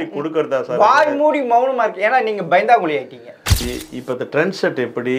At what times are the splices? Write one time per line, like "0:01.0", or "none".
0:03.6

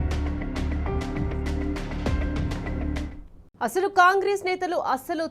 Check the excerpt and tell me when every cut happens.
none

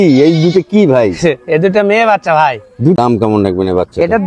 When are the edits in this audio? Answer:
0:03.0

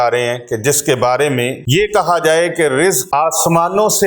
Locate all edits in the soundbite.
0:01.6
0:03.0

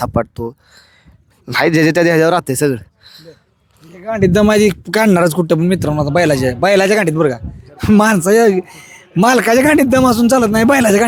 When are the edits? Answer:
none

